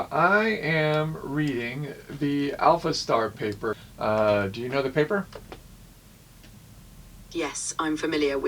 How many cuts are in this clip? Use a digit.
1